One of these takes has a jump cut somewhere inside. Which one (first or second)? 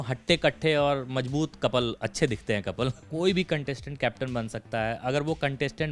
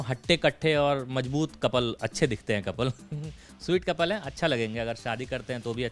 first